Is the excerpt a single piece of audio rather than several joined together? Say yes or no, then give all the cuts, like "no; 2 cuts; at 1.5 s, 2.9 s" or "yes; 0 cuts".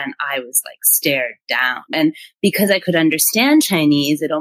no; 1 cut; at 1.9 s